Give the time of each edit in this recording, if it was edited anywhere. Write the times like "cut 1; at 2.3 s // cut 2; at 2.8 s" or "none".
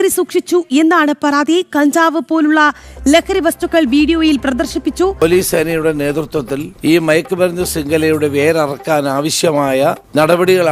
cut 1; at 5.1 s